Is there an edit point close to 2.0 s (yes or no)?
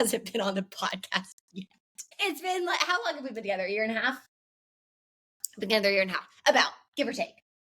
yes